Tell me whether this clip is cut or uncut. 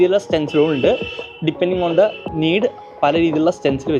cut